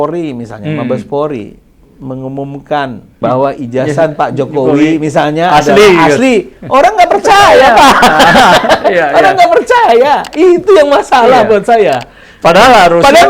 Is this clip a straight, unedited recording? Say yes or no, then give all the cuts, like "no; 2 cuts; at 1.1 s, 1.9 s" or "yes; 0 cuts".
no; 1 cut; at 3.0 s